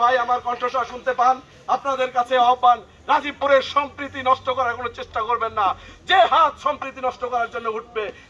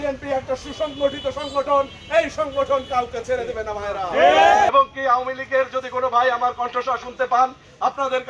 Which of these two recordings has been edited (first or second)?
second